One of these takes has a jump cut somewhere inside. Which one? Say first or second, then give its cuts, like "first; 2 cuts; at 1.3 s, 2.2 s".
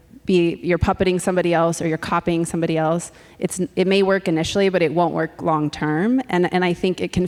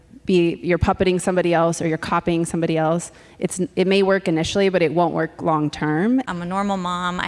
second; 1 cut; at 6.3 s